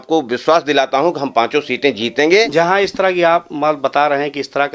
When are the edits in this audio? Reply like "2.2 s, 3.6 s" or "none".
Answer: 2.5 s